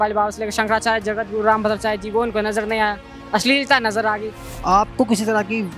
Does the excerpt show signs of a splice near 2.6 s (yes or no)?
no